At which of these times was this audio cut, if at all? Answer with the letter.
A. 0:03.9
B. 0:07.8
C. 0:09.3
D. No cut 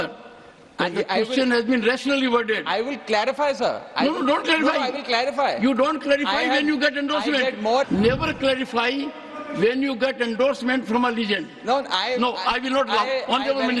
B